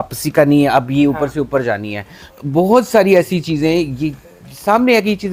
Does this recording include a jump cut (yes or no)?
no